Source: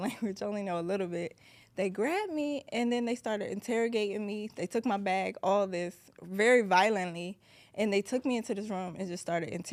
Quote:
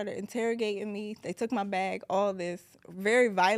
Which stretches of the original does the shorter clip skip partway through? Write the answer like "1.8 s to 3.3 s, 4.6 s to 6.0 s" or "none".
none